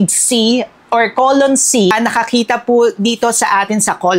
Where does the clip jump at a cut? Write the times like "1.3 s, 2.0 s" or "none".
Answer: 1.9 s